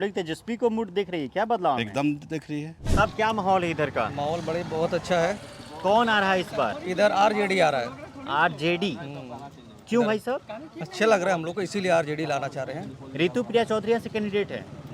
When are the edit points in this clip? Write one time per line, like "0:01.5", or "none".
0:02.8

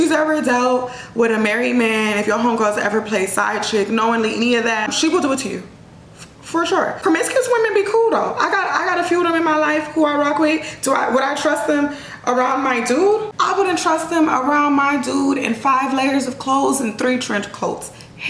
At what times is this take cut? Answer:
0:04.9
0:07.0
0:13.3

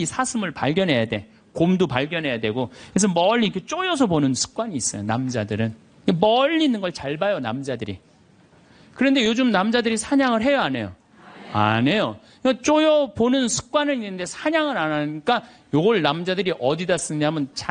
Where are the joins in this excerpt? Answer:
none

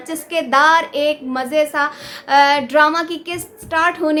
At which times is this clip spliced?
none

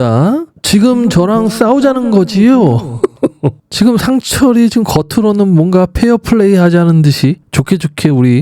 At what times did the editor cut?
0:03.6

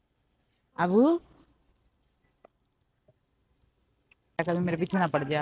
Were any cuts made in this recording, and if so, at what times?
0:04.4

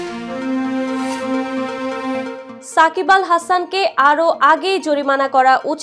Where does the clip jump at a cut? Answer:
none

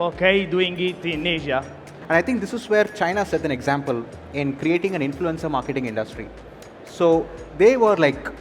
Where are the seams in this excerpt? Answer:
0:01.9

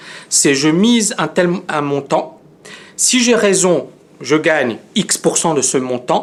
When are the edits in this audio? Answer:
none

